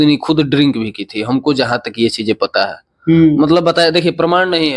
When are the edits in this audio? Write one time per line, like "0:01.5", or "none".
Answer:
none